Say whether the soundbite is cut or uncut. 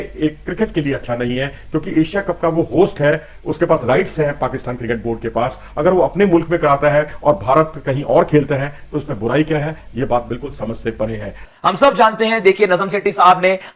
cut